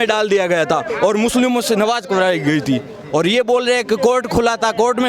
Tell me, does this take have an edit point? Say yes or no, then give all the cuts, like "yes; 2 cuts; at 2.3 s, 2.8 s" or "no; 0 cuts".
no; 0 cuts